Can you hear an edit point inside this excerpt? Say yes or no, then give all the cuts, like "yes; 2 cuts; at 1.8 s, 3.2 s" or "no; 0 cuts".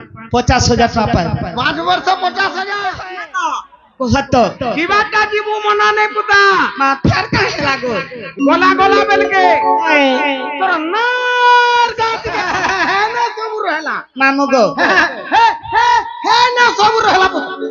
yes; 2 cuts; at 2.7 s, 12.3 s